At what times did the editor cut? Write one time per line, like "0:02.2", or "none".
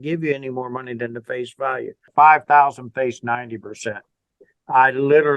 0:02.0